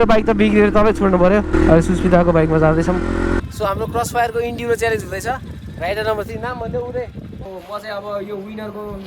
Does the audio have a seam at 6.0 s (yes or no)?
no